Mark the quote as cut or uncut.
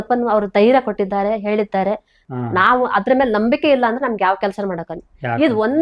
cut